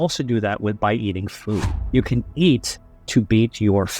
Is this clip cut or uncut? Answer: cut